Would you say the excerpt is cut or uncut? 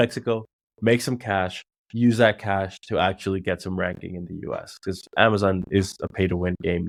uncut